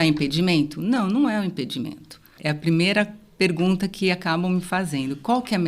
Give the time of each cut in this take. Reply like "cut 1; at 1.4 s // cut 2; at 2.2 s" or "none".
cut 1; at 2.3 s